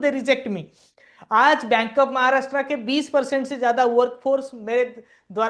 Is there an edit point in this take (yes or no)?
no